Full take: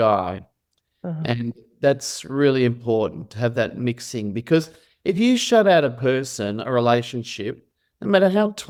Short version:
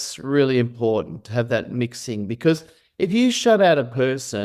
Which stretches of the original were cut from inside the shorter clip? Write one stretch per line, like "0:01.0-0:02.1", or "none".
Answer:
none